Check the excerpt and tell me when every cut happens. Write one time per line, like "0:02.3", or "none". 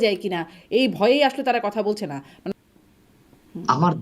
0:02.4